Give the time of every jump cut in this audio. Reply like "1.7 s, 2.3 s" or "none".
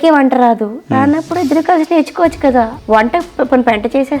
2.7 s